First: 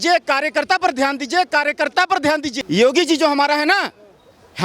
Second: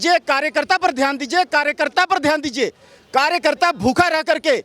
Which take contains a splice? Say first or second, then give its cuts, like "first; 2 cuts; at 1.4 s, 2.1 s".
first; 1 cut; at 2.5 s